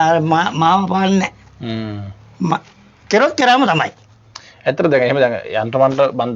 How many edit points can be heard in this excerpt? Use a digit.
0